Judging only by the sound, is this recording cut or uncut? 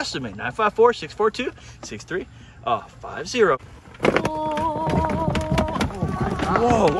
cut